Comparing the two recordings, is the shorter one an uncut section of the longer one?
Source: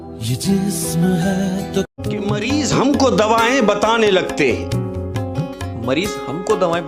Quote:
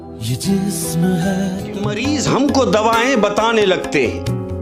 no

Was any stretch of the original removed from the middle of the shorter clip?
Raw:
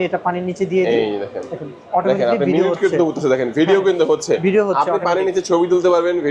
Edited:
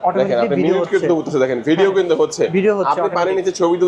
no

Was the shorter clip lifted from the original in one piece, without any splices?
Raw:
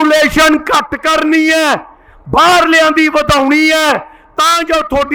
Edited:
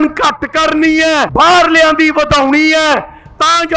no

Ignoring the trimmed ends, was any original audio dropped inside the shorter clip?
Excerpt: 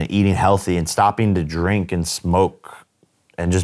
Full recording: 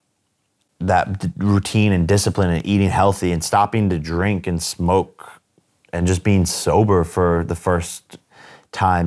no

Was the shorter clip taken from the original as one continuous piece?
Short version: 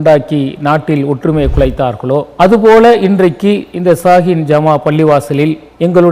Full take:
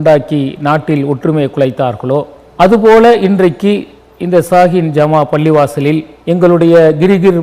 no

